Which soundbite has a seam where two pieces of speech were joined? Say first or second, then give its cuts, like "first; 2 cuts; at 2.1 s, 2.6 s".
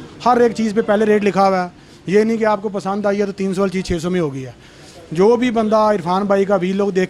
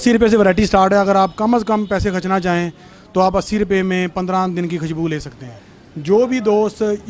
second; 1 cut; at 5.5 s